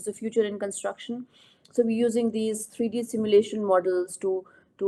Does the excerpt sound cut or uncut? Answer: uncut